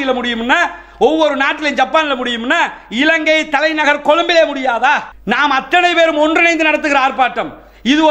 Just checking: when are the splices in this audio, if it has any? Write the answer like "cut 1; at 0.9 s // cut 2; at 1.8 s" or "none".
cut 1; at 5.1 s